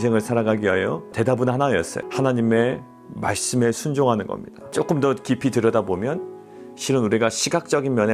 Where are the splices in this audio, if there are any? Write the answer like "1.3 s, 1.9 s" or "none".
1.1 s, 2.0 s, 4.7 s